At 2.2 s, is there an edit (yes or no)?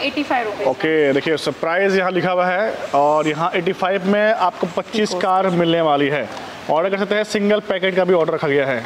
no